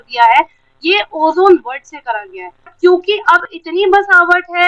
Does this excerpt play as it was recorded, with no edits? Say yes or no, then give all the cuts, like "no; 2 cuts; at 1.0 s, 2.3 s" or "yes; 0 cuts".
no; 1 cut; at 2.7 s